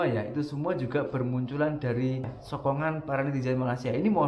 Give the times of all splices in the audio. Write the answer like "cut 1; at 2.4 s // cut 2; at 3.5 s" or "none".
cut 1; at 2.4 s

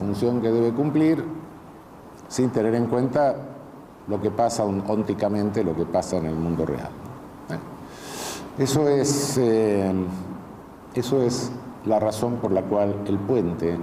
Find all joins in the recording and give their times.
none

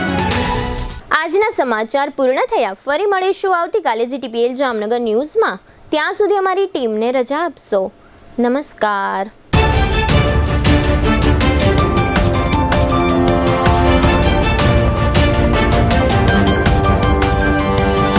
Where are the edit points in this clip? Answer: none

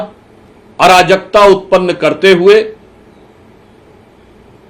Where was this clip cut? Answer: none

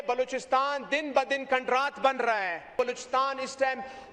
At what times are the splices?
cut 1; at 2.8 s

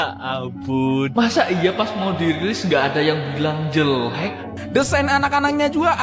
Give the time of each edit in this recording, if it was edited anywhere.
cut 1; at 4.5 s

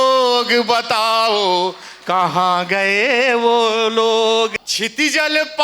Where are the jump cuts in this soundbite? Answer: cut 1; at 4.5 s

